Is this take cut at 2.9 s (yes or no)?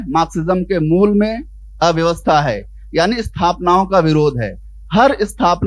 no